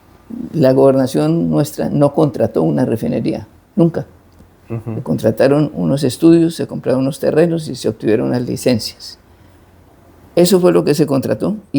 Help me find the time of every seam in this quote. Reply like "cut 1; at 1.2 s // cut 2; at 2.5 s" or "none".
none